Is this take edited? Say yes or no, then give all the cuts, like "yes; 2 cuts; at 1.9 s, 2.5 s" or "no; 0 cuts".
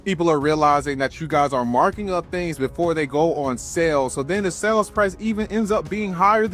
no; 0 cuts